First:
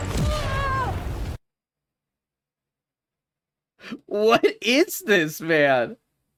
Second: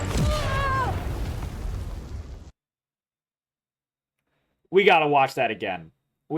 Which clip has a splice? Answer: second; 1 cut; at 1.3 s

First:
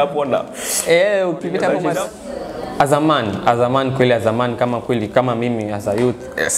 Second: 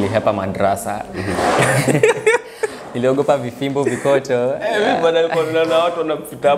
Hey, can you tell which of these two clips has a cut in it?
first; 1 cut; at 1.8 s

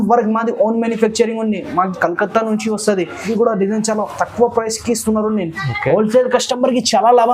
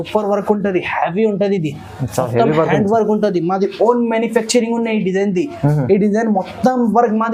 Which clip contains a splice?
first; 1 cut; at 3.3 s

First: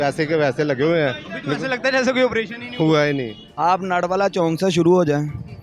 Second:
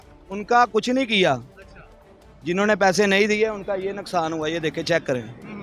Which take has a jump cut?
first; 1 cut; at 3.4 s

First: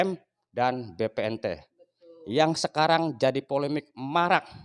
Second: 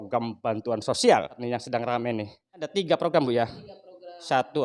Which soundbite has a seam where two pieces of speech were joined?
second; 2 cuts; at 1.4 s, 2.7 s

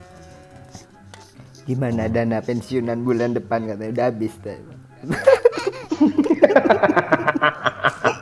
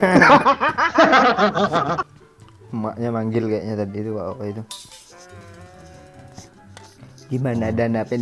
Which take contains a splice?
second; 1 cut; at 2.0 s

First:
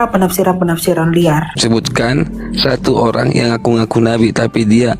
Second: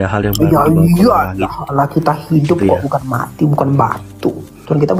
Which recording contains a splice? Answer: first; 1 cut; at 1.5 s

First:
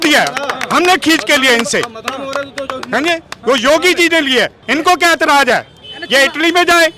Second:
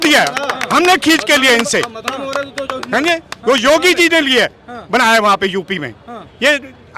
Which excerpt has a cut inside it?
first; 1 cut; at 4.6 s

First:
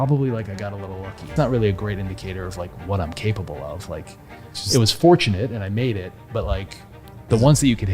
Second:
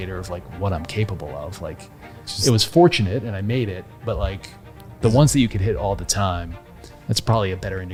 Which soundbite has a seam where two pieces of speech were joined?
first; 1 cut; at 1.2 s

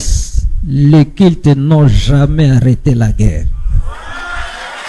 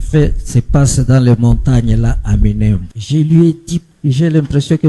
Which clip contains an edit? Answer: second; 2 cuts; at 2.9 s, 3.9 s

